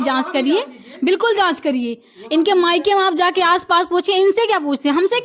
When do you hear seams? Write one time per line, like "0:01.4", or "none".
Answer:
none